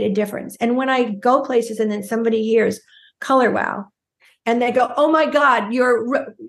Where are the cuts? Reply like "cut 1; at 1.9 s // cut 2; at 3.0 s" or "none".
none